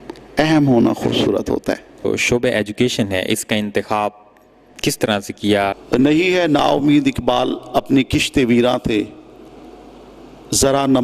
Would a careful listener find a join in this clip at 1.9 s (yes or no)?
yes